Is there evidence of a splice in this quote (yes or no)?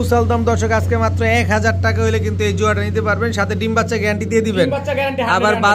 no